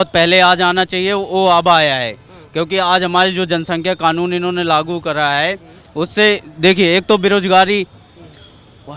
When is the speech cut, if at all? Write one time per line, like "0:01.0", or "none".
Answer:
none